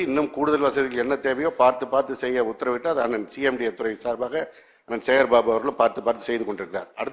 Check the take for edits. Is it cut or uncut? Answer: uncut